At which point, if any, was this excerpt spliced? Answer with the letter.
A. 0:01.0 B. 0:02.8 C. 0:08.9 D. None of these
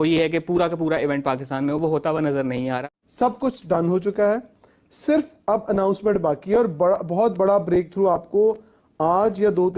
B